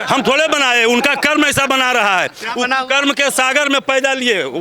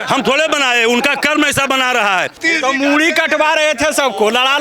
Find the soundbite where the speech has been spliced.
second; 1 cut; at 2.4 s

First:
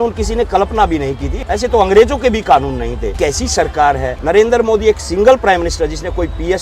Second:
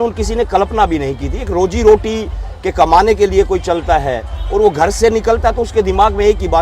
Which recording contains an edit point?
first; 3 cuts; at 1.3 s, 3.1 s, 4.2 s

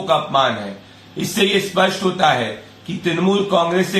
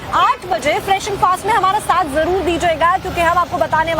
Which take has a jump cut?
second; 1 cut; at 1.5 s

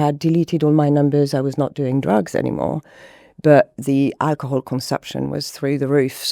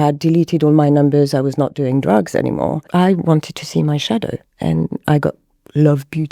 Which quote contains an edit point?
second; 1 cut; at 2.8 s

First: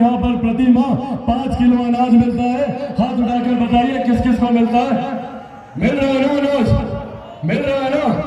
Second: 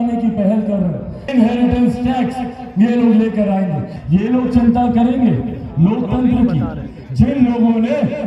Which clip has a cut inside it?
second; 2 cuts; at 1.1 s, 3.9 s

